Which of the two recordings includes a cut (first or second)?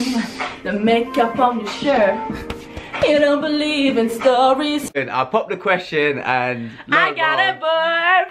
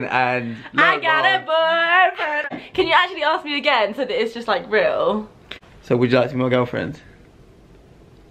first